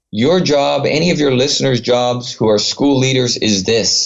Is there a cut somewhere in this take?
no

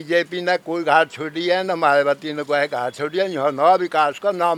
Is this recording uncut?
yes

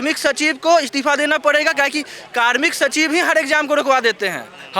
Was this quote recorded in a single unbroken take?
yes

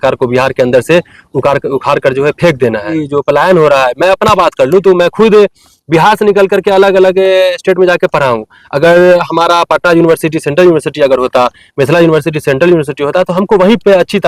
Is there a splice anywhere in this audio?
yes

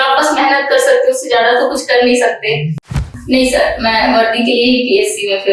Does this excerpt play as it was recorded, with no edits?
no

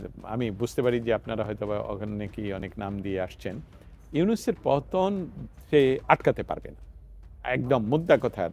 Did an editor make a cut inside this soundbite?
no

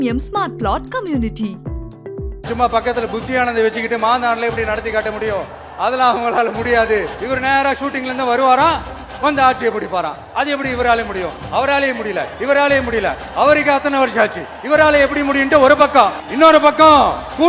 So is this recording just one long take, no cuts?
no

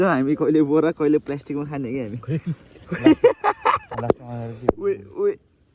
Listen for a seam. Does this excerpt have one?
no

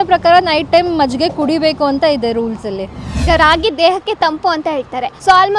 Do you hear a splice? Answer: yes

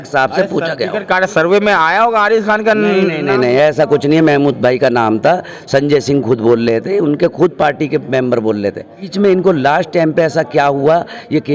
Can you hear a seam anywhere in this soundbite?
yes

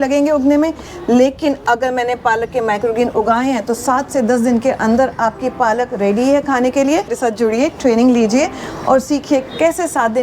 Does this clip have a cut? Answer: yes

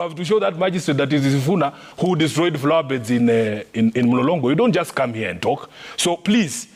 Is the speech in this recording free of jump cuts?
yes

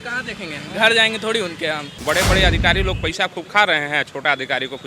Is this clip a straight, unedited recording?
no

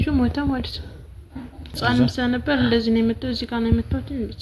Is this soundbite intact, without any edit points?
no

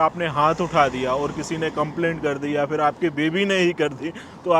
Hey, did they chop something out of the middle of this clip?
no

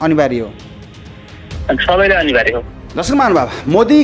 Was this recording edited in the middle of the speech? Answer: yes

